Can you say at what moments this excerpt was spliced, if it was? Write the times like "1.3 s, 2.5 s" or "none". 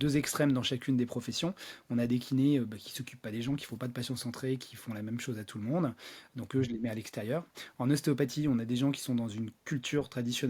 none